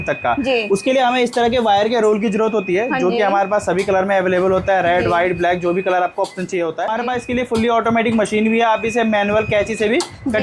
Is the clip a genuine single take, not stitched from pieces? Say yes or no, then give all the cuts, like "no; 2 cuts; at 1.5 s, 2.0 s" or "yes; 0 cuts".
no; 1 cut; at 6.9 s